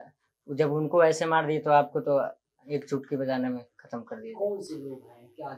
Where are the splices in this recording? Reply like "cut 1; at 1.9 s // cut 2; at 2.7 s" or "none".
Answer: none